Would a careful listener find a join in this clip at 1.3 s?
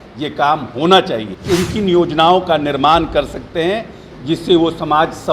yes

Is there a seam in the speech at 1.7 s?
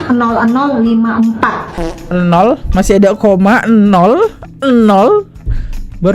yes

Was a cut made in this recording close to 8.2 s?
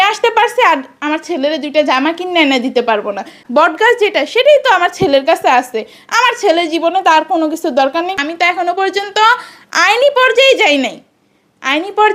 yes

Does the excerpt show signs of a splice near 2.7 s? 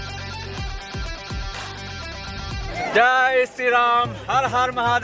yes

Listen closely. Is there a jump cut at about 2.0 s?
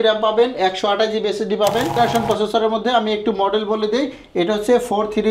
yes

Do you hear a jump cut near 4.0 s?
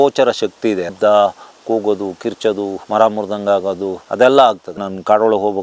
yes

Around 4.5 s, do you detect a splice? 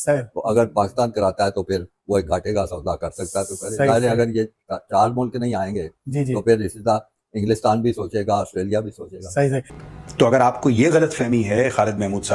no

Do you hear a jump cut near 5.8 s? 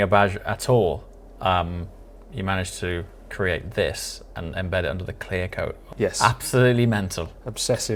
yes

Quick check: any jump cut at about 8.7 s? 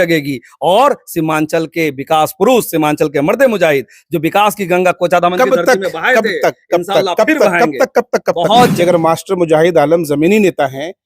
yes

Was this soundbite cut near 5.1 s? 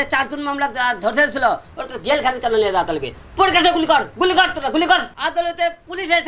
yes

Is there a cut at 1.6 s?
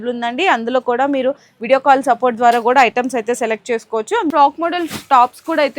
no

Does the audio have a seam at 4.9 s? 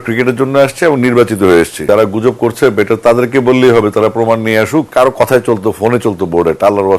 yes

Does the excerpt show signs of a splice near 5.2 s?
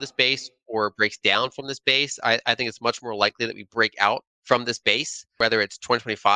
yes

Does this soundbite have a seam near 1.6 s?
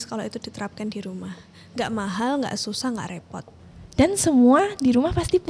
no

